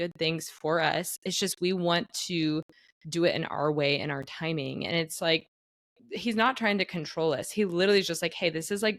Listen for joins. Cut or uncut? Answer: uncut